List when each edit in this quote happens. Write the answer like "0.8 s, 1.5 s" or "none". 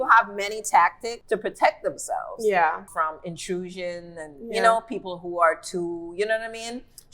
1.1 s, 2.8 s